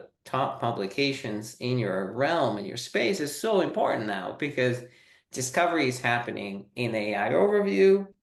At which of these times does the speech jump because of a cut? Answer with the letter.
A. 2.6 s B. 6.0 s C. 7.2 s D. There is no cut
D